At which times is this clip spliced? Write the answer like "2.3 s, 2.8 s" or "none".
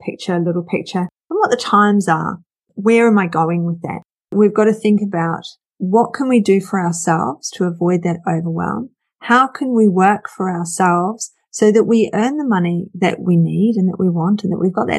4.2 s

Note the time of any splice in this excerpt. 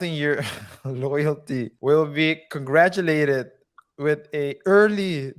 1.7 s

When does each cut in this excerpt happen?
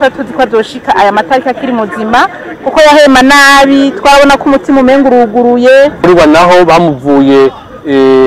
6.0 s

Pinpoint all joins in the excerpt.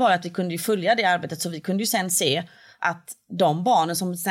none

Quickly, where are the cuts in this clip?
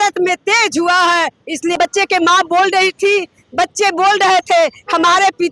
1.8 s

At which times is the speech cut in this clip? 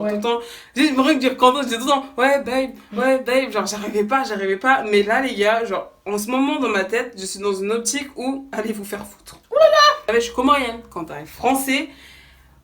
10.0 s

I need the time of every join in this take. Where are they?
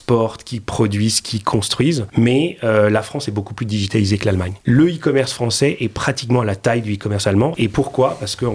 2.0 s, 4.5 s, 7.5 s

